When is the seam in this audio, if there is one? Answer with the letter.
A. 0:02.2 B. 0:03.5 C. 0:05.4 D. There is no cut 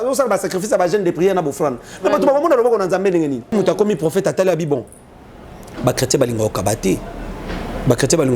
B